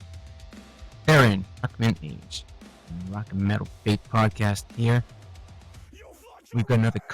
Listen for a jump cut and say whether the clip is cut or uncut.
cut